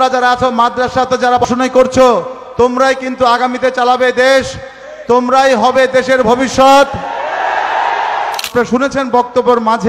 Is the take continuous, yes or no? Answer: no